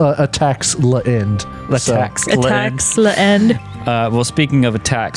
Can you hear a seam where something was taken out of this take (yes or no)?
no